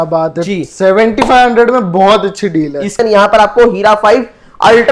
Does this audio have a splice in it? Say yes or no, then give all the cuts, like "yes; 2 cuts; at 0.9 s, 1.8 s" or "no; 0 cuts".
yes; 1 cut; at 3.0 s